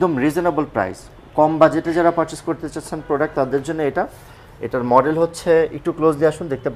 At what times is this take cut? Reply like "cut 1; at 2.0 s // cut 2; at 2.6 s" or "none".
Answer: none